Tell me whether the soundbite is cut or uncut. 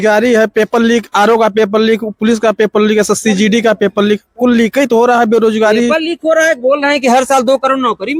uncut